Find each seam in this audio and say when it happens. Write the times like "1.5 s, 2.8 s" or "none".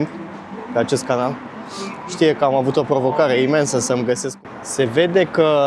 4.3 s